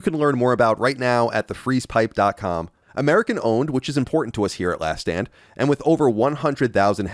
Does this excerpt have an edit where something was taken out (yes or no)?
yes